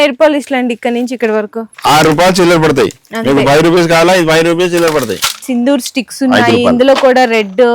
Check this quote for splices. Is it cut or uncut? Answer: cut